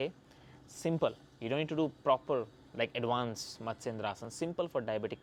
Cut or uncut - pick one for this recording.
uncut